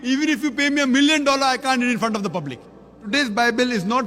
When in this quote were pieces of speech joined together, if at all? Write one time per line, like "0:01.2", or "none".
0:03.0